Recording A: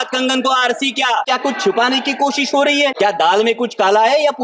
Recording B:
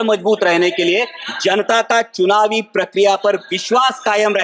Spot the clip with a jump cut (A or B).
A